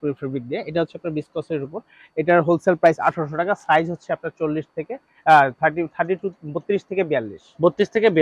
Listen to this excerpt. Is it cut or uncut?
uncut